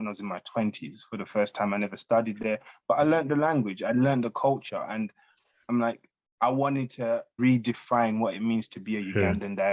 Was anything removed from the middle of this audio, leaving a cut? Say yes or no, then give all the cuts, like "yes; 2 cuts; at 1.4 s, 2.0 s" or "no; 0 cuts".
yes; 1 cut; at 7.3 s